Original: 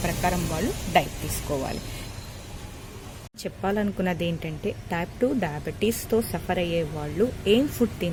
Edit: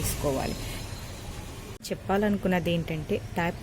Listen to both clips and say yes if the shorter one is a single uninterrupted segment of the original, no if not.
no